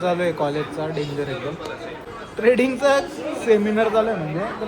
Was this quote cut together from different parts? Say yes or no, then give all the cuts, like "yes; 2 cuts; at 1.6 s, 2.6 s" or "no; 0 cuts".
yes; 1 cut; at 2.0 s